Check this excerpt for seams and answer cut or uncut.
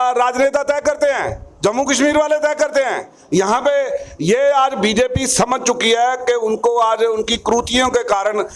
uncut